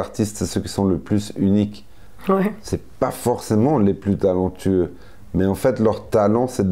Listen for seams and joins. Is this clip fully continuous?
yes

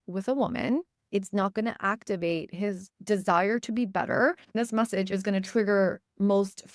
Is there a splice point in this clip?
yes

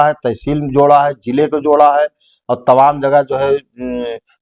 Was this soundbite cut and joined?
no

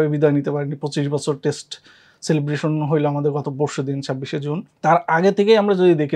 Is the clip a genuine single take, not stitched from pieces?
yes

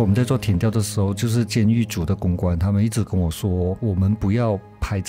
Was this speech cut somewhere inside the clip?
yes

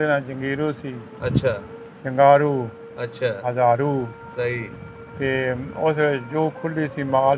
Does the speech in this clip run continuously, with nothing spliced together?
yes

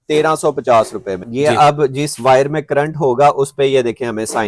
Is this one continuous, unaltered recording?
no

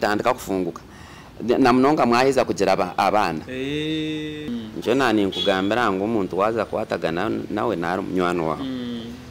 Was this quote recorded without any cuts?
no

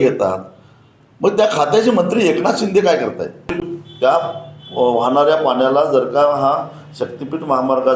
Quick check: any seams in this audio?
yes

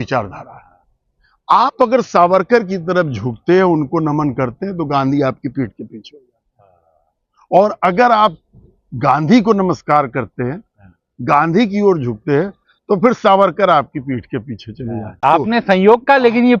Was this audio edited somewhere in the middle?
yes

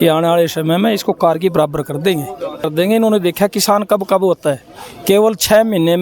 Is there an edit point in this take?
yes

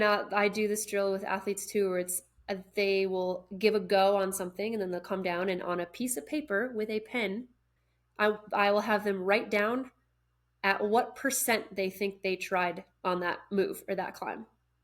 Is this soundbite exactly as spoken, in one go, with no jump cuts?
no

